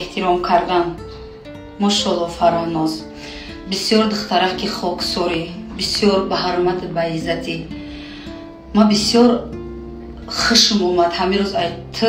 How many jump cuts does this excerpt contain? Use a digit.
0